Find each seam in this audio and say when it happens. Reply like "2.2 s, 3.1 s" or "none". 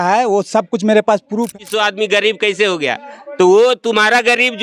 1.5 s